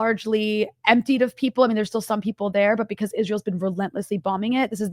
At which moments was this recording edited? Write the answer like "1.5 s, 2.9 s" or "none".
none